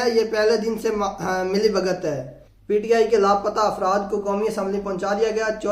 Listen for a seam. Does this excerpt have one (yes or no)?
yes